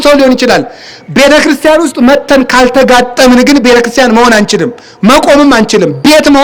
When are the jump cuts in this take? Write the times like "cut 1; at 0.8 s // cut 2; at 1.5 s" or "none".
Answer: none